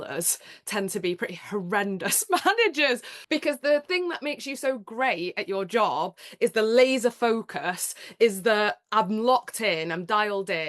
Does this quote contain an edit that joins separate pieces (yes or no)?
yes